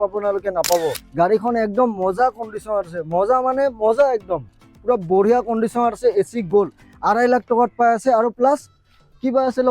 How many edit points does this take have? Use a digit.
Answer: 1